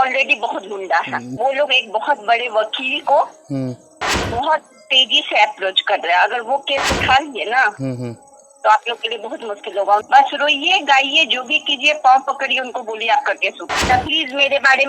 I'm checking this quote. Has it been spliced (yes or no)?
yes